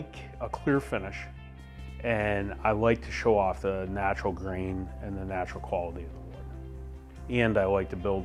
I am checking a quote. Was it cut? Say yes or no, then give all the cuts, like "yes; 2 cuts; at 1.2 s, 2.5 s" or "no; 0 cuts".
no; 0 cuts